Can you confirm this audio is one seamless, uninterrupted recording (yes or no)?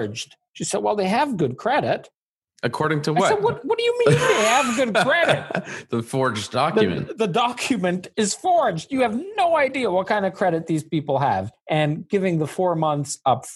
no